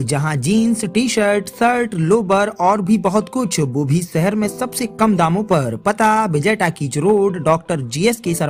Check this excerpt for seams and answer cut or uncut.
uncut